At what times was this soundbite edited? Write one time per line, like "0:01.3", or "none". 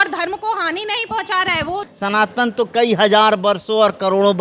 0:01.9